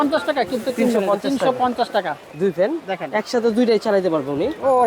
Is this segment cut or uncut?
cut